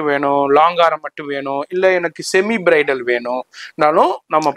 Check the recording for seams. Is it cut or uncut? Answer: uncut